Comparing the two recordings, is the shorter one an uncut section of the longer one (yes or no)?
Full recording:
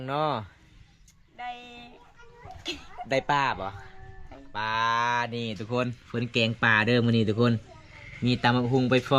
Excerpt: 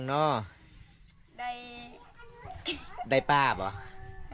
yes